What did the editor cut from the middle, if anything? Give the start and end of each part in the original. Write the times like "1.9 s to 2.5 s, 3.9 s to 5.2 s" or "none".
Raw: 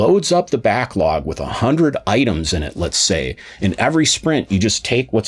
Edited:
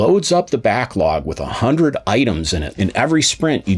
2.6 s to 3.5 s